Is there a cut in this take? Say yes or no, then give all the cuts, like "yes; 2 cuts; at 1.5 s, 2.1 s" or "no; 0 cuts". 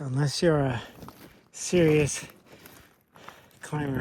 no; 0 cuts